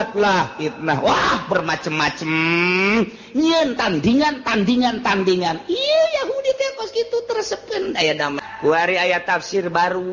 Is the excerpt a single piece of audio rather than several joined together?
no; 1 cut; at 8.5 s

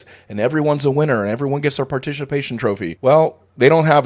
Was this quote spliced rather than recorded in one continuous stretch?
yes; 1 cut; at 2.9 s

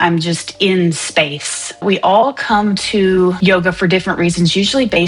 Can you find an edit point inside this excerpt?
yes; 2 cuts; at 1.8 s, 3.4 s

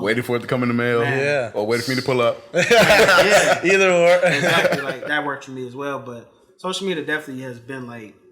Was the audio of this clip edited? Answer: yes; 1 cut; at 5.0 s

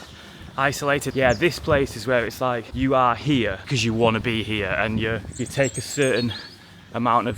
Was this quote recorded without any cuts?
no; 4 cuts; at 1.1 s, 2.7 s, 3.6 s, 5.3 s

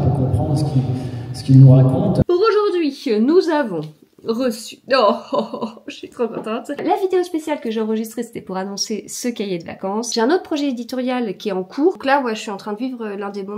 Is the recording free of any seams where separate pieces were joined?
no; 4 cuts; at 2.2 s, 6.8 s, 10.1 s, 12.0 s

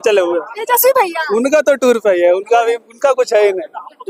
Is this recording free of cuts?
yes; 0 cuts

